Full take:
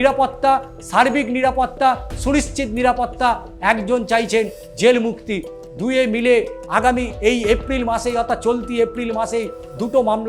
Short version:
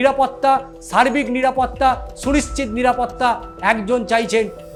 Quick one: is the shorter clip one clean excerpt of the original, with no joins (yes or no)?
yes